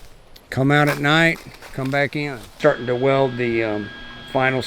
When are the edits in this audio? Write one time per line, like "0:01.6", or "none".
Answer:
0:02.6